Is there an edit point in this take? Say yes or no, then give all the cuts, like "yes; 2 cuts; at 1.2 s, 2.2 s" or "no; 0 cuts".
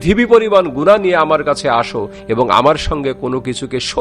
no; 0 cuts